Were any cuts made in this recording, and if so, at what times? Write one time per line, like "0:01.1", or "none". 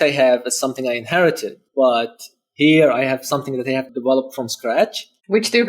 0:01.6
0:03.9